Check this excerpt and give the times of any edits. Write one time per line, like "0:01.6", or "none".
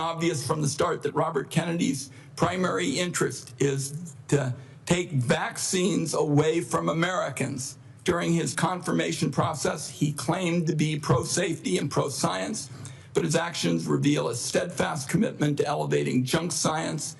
none